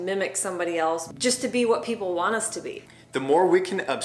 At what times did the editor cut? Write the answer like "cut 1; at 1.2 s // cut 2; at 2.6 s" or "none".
cut 1; at 2.9 s